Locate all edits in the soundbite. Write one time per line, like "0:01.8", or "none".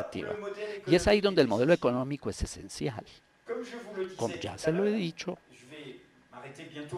0:03.5